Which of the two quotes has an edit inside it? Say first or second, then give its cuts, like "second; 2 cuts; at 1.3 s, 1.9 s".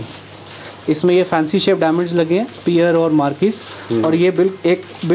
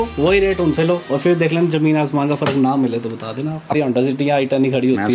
second; 1 cut; at 3.7 s